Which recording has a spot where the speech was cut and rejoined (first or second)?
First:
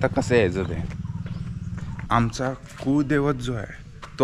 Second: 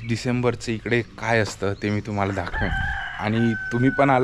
first